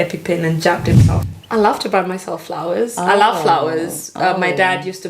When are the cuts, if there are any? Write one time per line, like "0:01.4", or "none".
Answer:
0:01.1